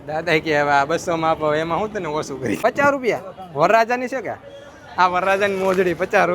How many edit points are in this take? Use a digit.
1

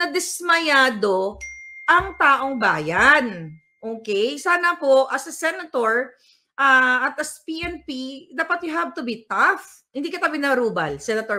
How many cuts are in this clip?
1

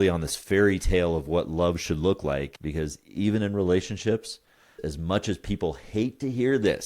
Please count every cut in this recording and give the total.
2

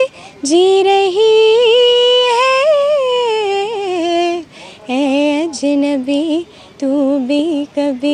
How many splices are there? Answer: 0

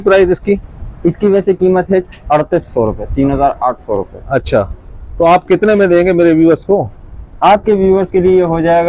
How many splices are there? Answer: 0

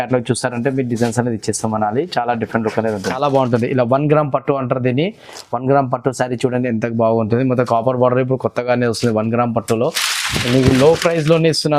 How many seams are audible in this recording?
1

